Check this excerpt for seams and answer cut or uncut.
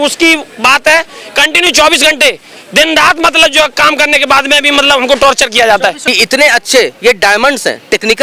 cut